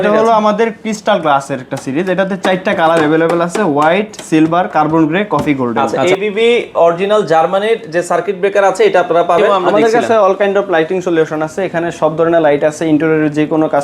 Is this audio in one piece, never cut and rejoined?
no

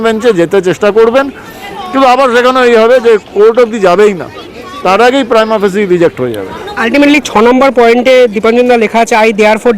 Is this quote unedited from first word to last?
yes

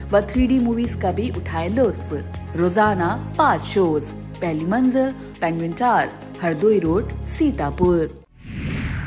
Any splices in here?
yes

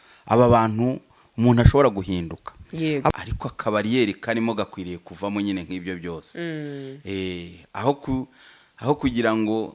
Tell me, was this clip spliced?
yes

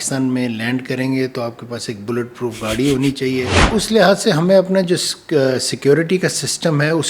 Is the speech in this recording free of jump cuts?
no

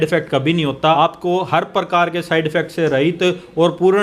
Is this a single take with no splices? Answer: no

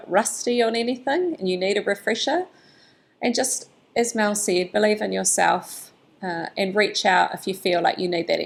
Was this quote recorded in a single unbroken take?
yes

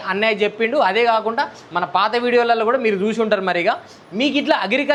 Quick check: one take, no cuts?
yes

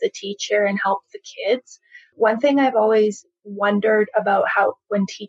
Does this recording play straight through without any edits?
no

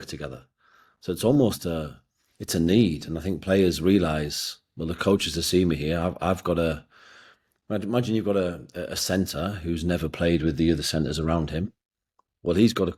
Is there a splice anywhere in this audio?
no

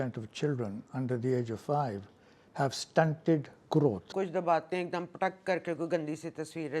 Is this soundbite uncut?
no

